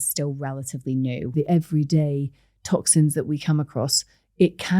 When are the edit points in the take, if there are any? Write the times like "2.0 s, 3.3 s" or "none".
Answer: 1.3 s